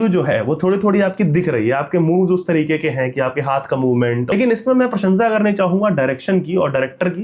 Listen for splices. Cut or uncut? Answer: cut